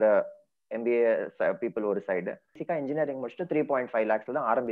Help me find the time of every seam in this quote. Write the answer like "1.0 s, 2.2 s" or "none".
2.6 s